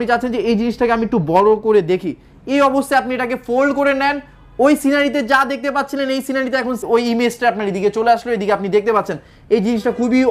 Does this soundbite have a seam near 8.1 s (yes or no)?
no